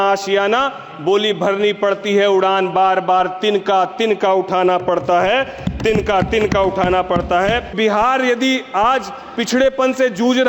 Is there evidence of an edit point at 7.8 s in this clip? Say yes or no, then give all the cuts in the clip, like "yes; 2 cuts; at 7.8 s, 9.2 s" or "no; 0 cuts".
yes; 1 cut; at 7.8 s